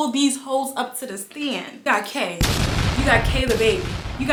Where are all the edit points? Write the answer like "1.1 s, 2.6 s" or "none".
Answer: none